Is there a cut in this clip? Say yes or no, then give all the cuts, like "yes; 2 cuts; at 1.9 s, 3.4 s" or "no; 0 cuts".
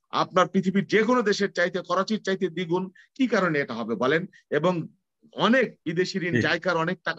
no; 0 cuts